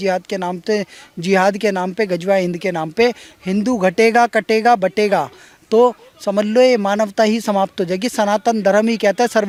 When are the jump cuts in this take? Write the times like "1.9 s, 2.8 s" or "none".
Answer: none